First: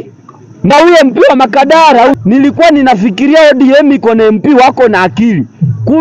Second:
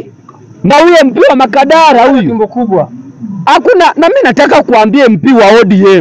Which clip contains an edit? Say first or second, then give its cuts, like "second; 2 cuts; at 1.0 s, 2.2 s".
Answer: first; 1 cut; at 2.1 s